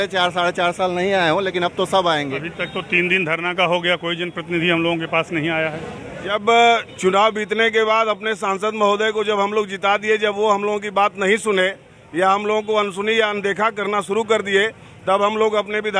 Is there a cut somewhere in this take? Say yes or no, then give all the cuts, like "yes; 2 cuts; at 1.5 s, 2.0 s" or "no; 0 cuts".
yes; 1 cut; at 6.3 s